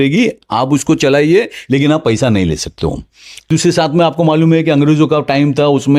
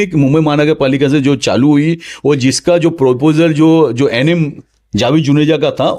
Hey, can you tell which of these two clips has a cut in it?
first; 1 cut; at 3.5 s

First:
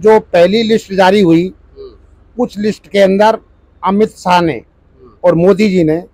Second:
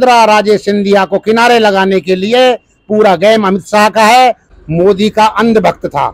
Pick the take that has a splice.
second; 1 cut; at 4.5 s

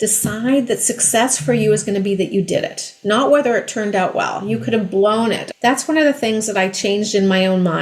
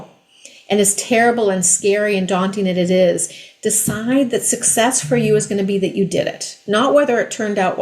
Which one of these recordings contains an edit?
first; 1 cut; at 5.5 s

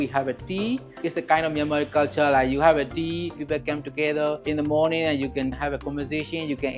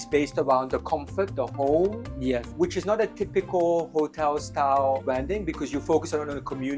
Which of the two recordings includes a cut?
first; 4 cuts; at 1.0 s, 3.4 s, 4.4 s, 5.5 s

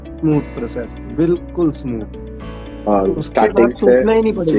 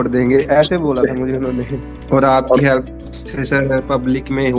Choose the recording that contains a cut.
second; 1 cut; at 1.9 s

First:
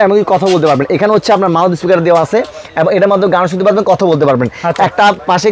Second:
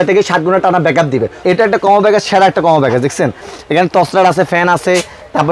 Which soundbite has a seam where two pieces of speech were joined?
second; 1 cut; at 1.3 s

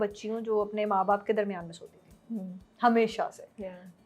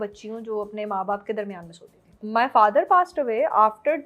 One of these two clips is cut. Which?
second; 1 cut; at 2.2 s

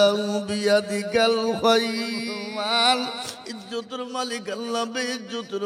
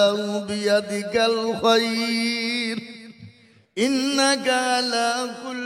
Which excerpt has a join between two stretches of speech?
first; 1 cut; at 2.3 s

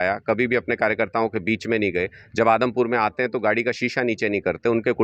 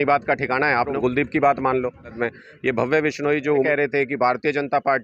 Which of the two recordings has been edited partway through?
second; 3 cuts; at 1.0 s, 2.2 s, 3.6 s

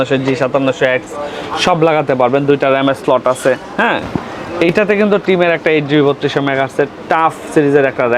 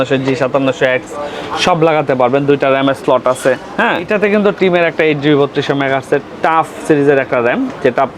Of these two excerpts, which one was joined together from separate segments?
second; 1 cut; at 4.1 s

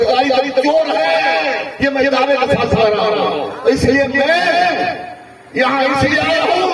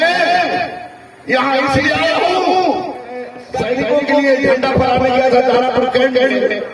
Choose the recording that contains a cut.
second; 1 cut; at 3.4 s

